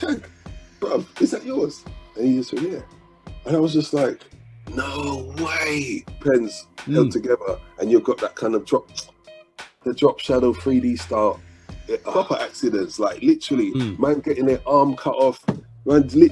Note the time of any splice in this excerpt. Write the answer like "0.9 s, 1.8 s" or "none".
6.2 s, 12.1 s